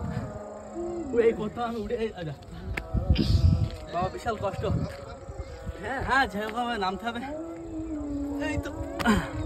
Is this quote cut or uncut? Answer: uncut